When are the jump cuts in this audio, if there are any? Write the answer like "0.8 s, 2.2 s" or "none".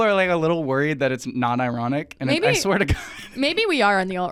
none